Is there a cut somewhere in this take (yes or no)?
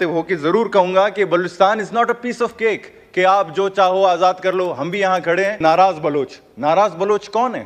yes